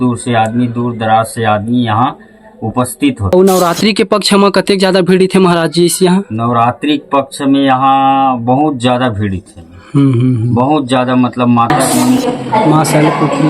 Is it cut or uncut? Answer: cut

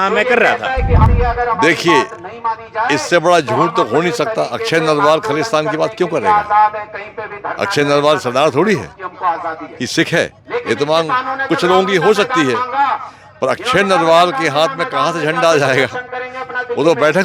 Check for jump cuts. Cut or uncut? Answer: cut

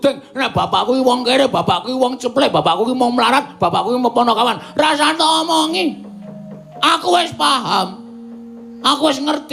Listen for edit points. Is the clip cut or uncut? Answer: uncut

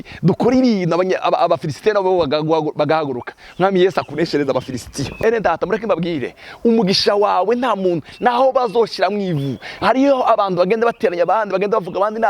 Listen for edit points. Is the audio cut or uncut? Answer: cut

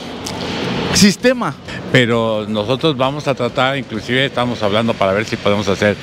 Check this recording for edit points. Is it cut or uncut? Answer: cut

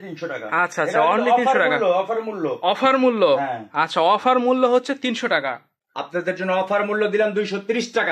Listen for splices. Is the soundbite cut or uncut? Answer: cut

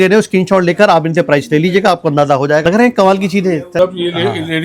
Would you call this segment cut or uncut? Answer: cut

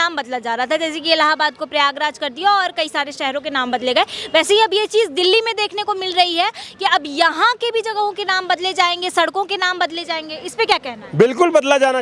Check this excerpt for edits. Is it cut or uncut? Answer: uncut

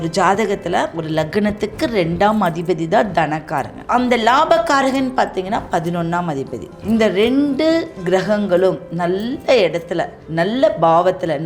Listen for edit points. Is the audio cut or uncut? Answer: cut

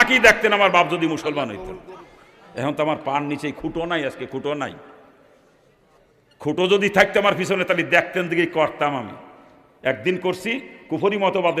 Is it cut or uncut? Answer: cut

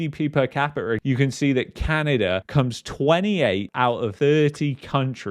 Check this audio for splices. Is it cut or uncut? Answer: cut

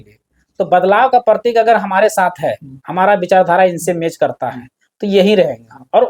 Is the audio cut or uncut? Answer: uncut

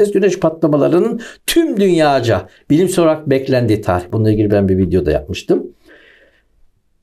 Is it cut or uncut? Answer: uncut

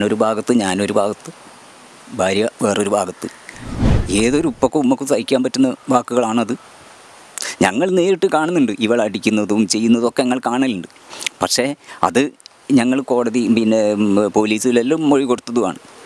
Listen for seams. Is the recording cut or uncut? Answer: cut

